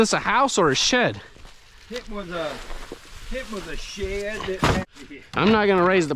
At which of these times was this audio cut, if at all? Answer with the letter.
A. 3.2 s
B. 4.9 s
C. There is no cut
B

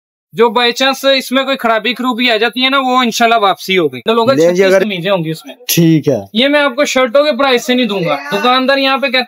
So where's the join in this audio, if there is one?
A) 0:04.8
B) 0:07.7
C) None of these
A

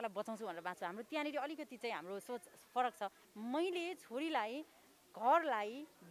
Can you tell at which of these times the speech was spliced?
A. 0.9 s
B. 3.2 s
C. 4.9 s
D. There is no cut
B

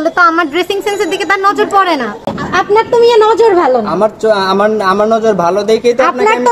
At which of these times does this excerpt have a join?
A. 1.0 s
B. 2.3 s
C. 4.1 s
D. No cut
B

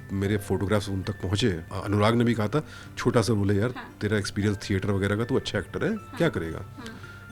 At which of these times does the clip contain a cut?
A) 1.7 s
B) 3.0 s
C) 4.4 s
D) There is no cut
A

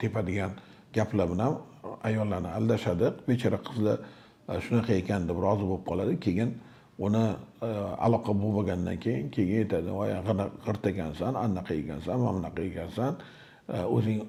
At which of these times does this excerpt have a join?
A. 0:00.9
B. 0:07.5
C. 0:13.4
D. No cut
D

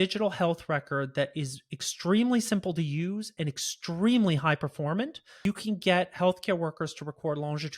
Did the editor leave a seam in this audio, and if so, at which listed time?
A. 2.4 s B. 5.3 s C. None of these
B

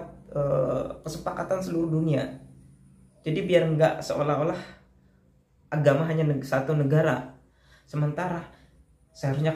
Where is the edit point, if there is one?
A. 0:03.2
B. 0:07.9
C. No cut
C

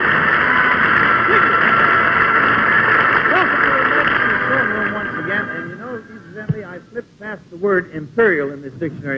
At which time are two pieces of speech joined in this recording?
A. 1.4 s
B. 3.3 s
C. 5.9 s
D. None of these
B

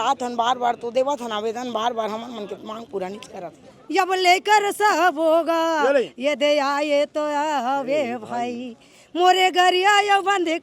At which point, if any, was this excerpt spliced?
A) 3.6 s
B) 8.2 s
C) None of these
A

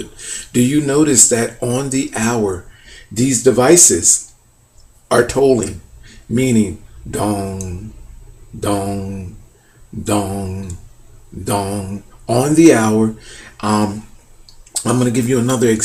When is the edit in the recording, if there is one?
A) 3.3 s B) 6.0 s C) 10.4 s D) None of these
D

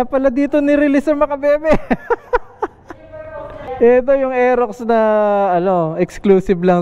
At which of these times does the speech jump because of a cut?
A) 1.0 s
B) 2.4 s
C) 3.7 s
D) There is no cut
C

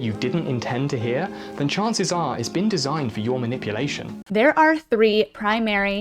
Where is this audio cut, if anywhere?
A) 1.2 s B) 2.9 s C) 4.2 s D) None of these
C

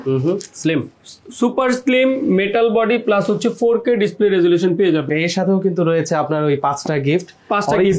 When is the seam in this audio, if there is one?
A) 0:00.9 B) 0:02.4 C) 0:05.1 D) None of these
C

